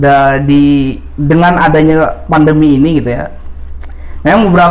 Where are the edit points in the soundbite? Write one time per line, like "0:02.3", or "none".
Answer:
none

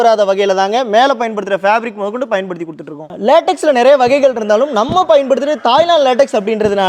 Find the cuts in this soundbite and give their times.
none

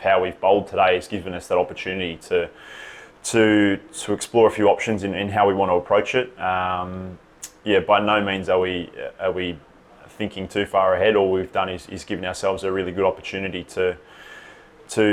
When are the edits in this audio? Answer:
none

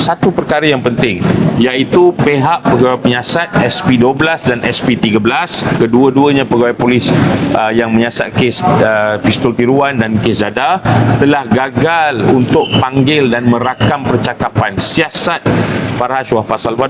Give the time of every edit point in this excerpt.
none

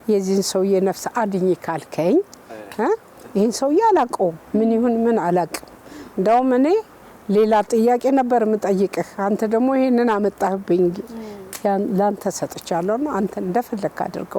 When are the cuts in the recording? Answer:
none

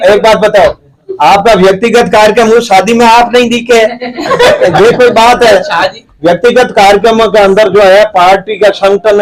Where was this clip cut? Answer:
none

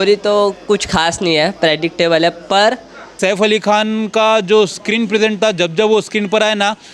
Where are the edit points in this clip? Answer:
0:03.1

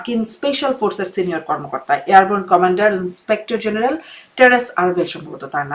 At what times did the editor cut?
none

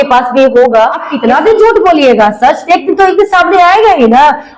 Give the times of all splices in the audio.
0:01.1

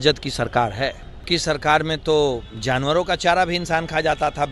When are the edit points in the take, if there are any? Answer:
0:01.2

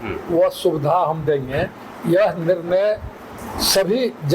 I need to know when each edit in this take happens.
none

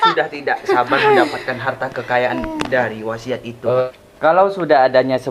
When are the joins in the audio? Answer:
0:03.8

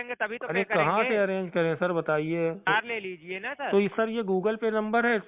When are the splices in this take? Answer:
0:02.7

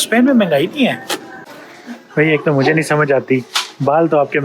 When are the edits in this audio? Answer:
0:01.7

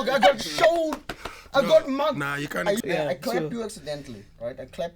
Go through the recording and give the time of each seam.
0:02.8

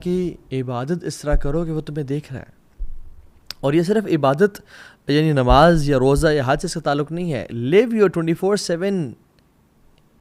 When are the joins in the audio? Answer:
none

